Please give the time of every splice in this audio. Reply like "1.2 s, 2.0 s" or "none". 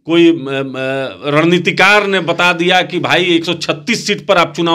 none